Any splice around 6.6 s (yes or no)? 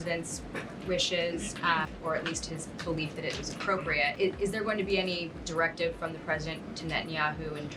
no